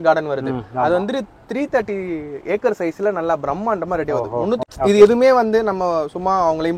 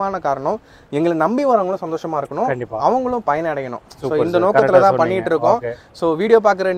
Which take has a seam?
first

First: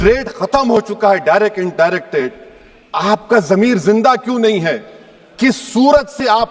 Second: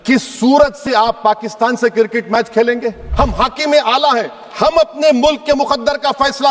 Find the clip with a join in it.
second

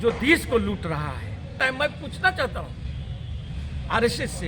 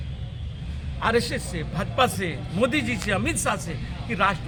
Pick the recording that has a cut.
first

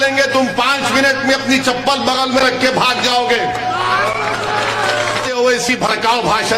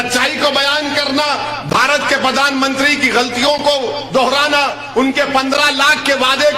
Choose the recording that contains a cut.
first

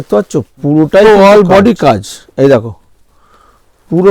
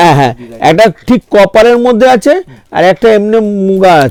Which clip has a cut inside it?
first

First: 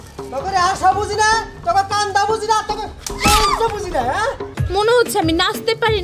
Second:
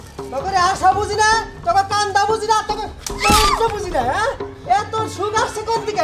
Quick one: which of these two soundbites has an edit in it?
first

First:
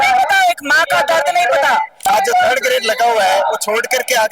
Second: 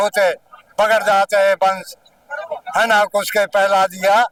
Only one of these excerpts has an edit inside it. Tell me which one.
first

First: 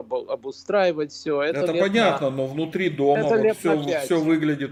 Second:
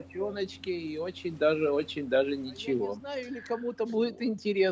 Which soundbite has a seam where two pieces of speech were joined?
second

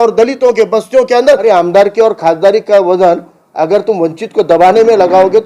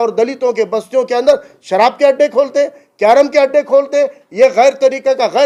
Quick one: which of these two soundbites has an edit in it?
first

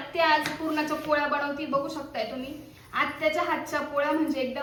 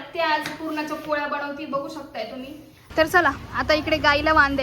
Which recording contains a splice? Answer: second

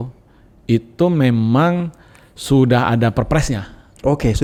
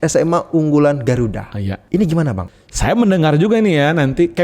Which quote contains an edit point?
second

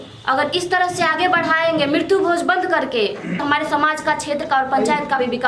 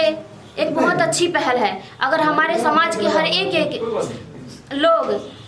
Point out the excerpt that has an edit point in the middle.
first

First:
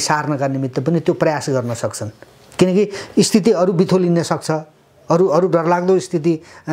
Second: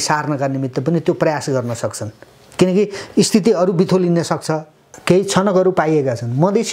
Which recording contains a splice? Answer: second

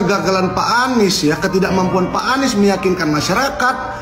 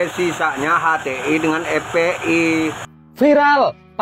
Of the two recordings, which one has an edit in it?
second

